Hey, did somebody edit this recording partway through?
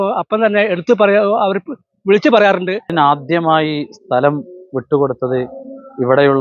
yes; 1 cut; at 2.9 s

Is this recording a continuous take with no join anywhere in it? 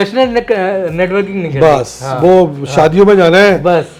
yes; 0 cuts

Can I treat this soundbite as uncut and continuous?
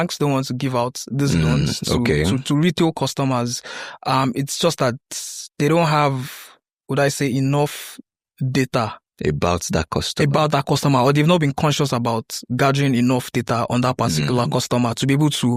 yes; 0 cuts

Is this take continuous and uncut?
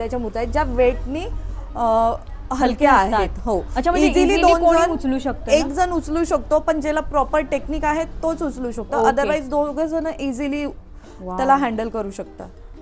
yes; 0 cuts

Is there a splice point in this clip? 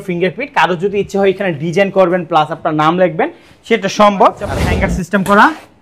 yes; 1 cut; at 4.5 s

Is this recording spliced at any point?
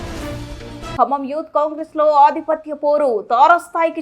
yes; 1 cut; at 1.0 s

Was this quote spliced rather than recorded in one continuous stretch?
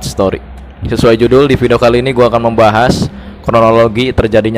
no; 0 cuts

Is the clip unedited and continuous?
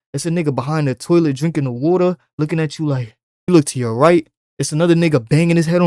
yes; 0 cuts

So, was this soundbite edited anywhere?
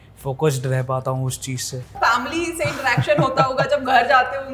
yes; 1 cut; at 1.9 s

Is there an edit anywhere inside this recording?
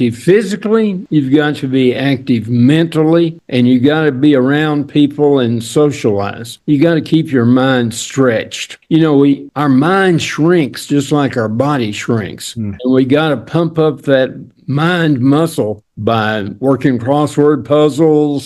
no; 0 cuts

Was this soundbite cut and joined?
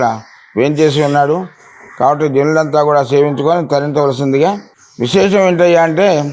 no; 0 cuts

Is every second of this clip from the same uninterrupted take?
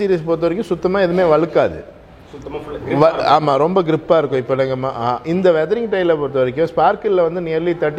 yes; 0 cuts

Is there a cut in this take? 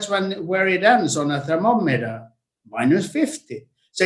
no; 0 cuts

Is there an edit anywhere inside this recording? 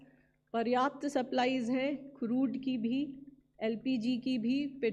no; 0 cuts

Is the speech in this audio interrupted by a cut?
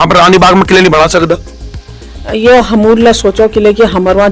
no; 0 cuts

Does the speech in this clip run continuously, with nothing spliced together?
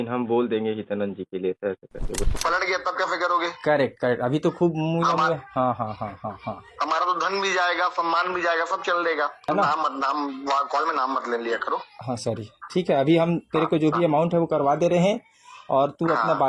no; 2 cuts; at 2.2 s, 9.5 s

